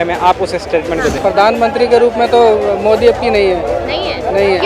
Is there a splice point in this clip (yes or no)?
yes